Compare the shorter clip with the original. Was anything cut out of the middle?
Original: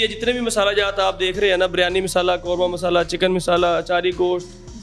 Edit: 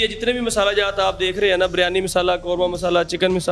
no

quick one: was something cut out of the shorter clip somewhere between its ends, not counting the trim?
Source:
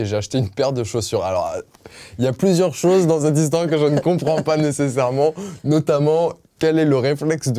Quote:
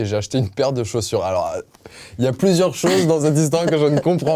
no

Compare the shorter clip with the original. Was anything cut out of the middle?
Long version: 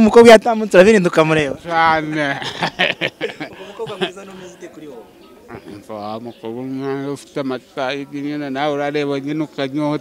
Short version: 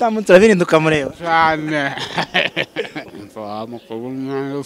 yes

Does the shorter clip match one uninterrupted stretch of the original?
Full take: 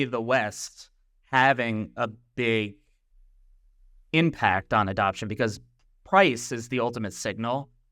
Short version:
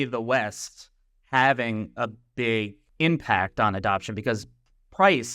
no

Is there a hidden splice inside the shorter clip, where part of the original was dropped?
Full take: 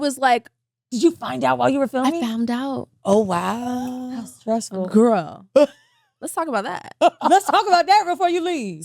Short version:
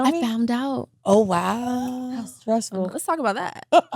yes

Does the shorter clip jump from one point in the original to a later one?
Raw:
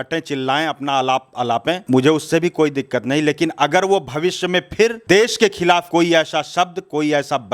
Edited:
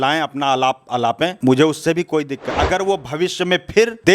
yes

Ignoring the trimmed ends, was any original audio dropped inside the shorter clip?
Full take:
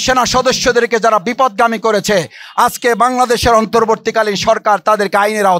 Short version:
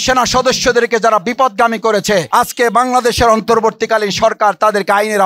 yes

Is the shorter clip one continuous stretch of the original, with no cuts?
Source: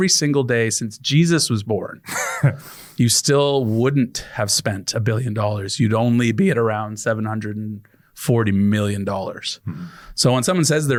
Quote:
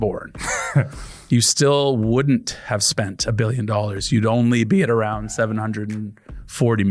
yes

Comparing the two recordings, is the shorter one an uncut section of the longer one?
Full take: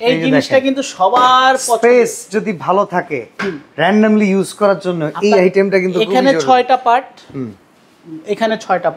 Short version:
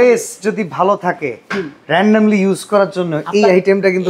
yes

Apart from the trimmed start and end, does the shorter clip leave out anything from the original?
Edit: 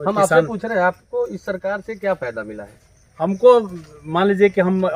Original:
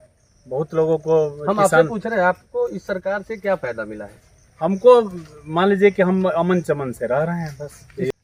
no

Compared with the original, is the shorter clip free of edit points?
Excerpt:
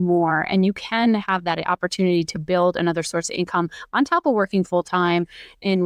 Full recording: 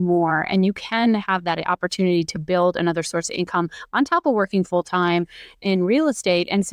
yes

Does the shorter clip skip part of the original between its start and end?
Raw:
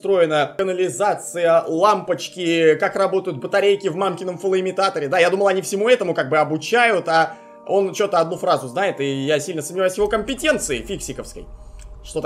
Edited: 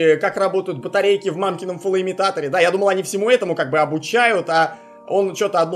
no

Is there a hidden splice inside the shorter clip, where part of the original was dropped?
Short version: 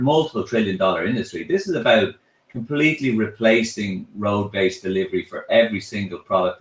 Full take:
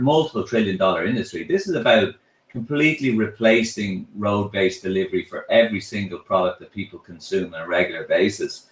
no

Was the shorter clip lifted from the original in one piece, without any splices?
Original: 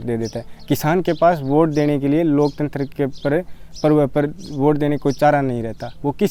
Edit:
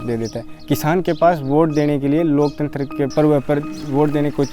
no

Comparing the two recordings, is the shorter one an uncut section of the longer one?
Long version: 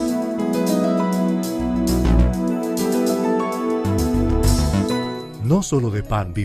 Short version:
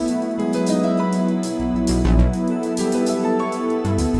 yes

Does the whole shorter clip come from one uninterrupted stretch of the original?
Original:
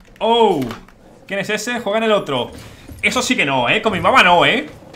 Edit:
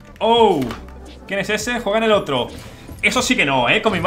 yes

